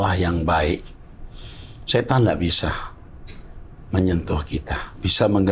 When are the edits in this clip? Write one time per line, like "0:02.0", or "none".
none